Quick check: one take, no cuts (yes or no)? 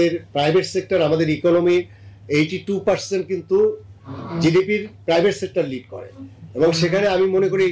yes